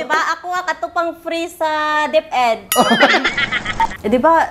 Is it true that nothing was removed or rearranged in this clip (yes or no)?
no